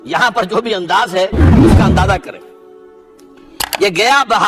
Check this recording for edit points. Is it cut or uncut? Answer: uncut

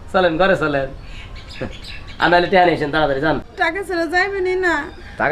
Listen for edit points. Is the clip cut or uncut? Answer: cut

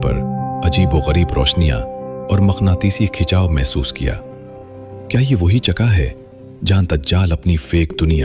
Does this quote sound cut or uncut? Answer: uncut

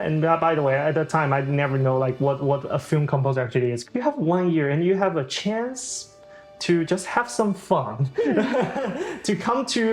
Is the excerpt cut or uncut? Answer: cut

